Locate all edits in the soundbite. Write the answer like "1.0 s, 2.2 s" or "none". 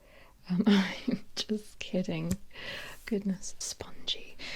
3.5 s